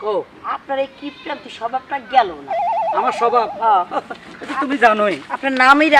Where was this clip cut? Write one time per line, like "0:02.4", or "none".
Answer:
none